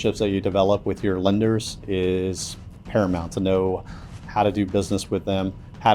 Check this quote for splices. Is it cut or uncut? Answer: uncut